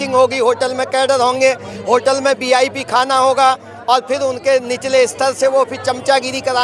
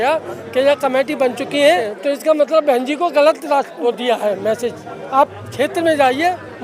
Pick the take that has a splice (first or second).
second